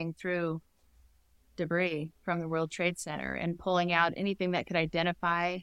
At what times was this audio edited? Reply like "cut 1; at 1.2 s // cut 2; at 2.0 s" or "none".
none